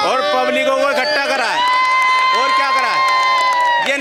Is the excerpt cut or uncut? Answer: uncut